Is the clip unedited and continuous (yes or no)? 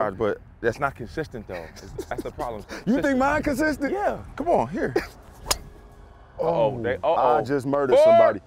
no